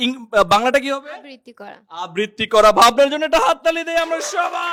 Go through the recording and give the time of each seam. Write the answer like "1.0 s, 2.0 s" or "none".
none